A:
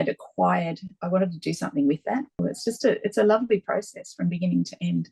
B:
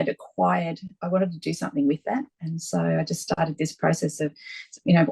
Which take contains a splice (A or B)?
A